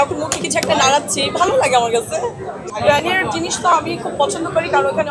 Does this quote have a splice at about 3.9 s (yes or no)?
no